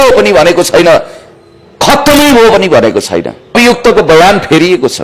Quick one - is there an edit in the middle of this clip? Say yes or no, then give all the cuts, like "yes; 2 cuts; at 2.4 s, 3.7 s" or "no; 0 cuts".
yes; 1 cut; at 3.5 s